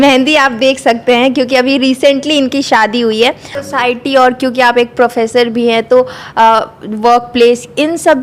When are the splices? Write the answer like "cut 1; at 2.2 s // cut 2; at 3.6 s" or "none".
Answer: none